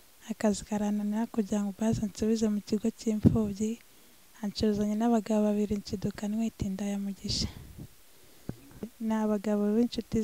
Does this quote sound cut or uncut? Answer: cut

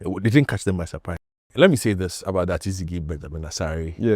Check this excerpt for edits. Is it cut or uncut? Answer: cut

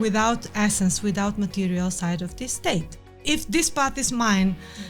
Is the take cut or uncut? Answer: cut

